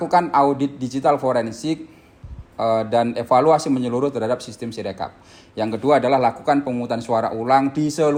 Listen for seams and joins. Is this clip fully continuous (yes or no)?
yes